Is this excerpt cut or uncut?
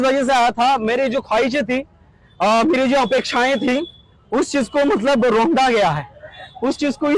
uncut